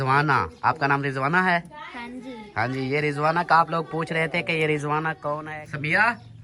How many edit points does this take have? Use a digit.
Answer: 1